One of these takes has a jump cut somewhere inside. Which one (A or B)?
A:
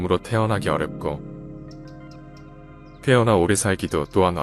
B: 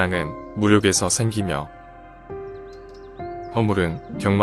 B